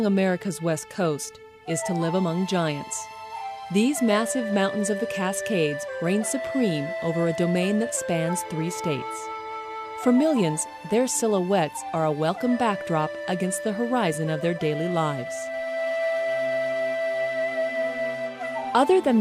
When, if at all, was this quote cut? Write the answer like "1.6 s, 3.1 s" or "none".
none